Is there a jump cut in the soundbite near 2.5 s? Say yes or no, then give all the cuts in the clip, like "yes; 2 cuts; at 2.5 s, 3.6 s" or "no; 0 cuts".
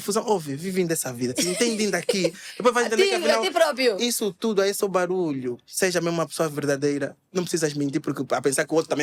no; 0 cuts